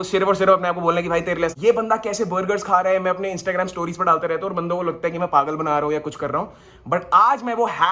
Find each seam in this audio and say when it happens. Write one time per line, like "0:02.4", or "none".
0:01.5

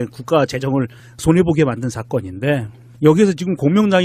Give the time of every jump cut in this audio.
none

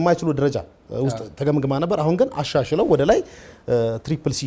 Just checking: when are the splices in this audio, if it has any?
none

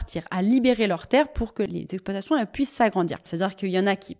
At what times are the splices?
0:01.7
0:03.2

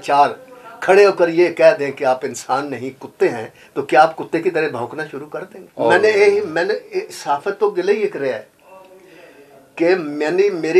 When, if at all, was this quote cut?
0:05.6

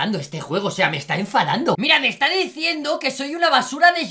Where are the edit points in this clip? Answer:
0:01.8

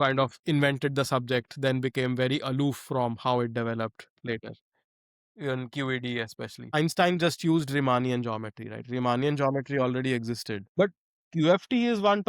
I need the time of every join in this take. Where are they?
0:06.7
0:10.6

